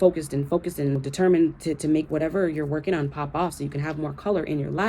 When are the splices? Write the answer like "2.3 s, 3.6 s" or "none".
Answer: 1.0 s